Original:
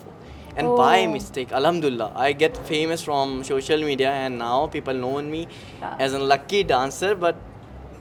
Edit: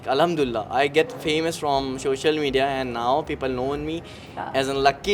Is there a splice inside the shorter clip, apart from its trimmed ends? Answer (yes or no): no